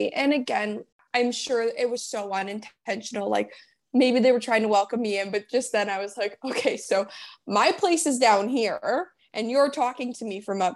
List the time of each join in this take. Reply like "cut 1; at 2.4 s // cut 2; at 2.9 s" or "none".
cut 1; at 0.9 s